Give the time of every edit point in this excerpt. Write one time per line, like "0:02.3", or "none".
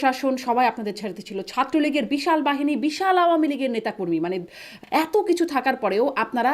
0:04.7